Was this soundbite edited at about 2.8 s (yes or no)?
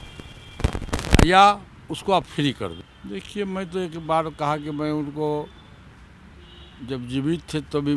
yes